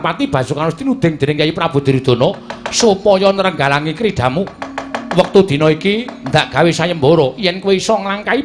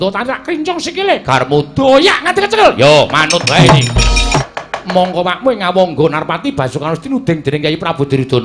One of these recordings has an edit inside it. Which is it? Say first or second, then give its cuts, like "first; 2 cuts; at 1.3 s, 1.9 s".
second; 1 cut; at 4.4 s